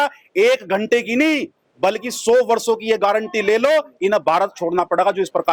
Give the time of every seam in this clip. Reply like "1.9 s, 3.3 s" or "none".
none